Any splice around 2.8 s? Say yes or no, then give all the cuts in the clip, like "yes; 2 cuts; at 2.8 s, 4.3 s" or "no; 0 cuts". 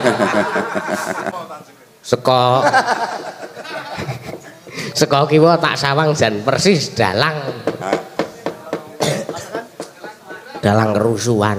no; 1 cut; at 1.2 s